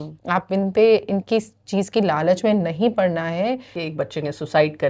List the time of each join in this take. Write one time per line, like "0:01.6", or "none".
0:03.8